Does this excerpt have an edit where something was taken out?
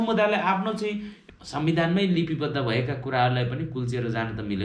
yes; 1 cut; at 1.1 s

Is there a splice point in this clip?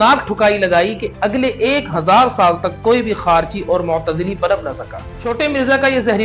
yes; 1 cut; at 5.0 s

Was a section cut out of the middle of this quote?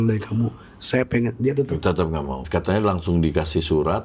yes; 1 cut; at 2.4 s

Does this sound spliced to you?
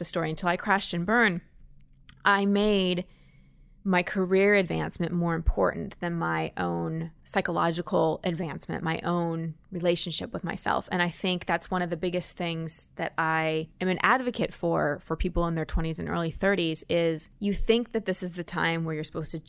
yes; 3 cuts; at 7.2 s, 13.7 s, 17.3 s

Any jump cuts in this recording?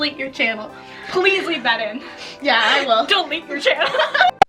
no; 0 cuts

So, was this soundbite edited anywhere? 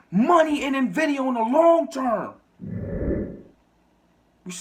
yes; 2 cuts; at 2.5 s, 3.3 s

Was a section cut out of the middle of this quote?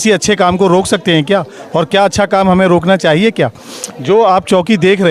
no; 0 cuts

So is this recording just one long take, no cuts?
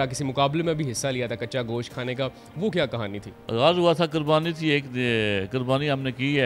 no; 1 cut; at 3.3 s

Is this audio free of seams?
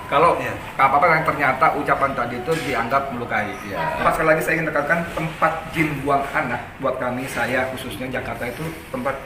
no; 1 cut; at 4.0 s

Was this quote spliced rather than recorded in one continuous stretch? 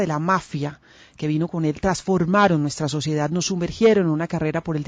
no; 0 cuts

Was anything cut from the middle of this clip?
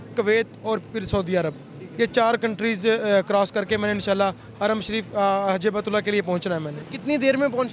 no; 0 cuts

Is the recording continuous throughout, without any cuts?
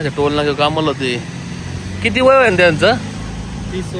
yes; 0 cuts

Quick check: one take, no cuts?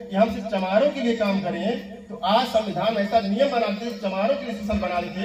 yes; 0 cuts

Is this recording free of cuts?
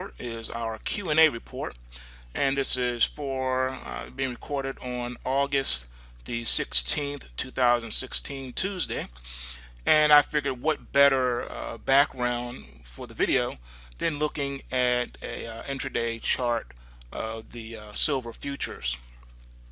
yes; 0 cuts

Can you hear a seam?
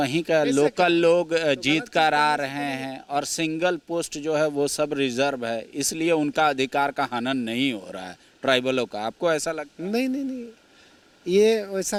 no; 0 cuts

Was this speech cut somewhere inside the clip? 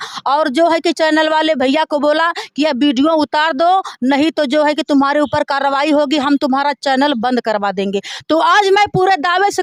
no; 0 cuts

